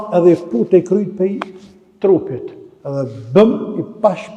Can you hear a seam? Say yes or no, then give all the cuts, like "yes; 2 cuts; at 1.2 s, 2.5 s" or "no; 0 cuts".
no; 0 cuts